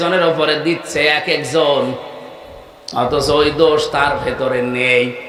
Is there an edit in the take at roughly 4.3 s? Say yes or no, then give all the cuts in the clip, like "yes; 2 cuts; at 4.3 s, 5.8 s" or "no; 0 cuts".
no; 0 cuts